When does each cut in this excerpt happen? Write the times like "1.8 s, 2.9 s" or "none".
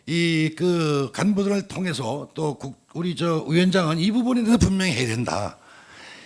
none